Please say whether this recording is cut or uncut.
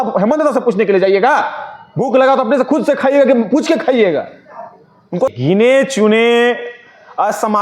cut